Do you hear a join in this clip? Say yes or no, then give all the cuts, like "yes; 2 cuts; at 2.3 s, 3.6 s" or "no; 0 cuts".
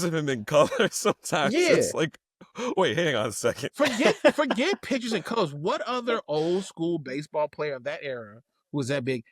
no; 0 cuts